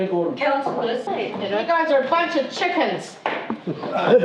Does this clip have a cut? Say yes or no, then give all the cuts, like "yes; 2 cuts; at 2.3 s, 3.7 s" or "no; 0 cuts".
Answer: yes; 1 cut; at 1.1 s